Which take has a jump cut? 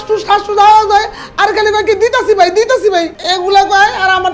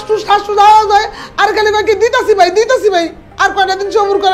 first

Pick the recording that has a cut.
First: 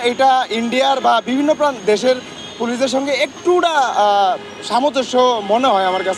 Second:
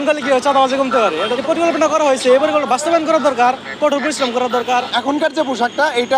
second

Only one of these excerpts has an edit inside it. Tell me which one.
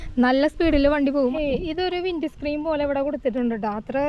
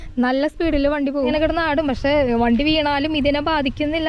second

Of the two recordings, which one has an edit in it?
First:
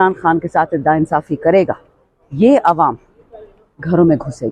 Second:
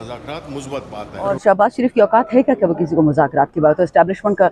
second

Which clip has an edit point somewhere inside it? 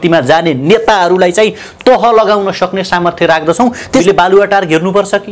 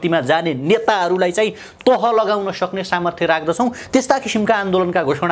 first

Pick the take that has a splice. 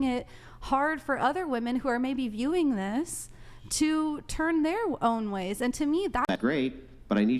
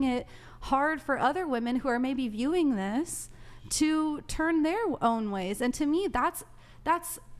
first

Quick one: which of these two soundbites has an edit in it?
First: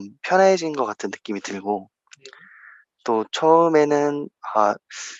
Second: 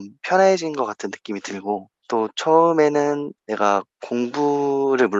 second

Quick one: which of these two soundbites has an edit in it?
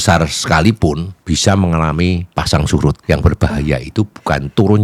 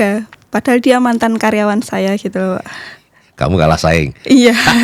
first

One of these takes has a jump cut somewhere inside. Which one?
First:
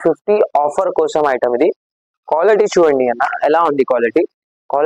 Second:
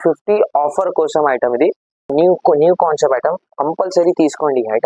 second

